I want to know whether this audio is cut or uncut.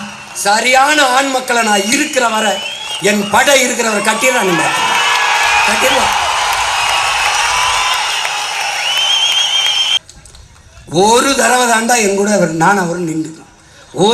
cut